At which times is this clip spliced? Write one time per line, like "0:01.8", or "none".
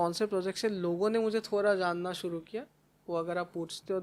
none